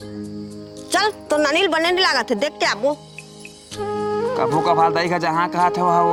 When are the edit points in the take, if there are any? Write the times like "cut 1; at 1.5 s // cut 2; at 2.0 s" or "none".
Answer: none